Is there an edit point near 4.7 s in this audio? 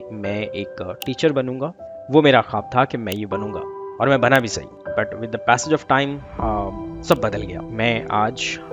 no; 2 cuts; at 1.9 s, 7.6 s

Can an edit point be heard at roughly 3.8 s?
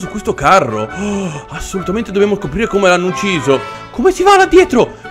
yes; 1 cut; at 3.8 s

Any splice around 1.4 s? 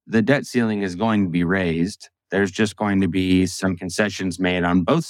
no; 0 cuts

